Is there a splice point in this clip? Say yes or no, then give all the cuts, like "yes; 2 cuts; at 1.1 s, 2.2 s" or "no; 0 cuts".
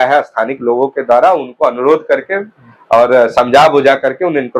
no; 0 cuts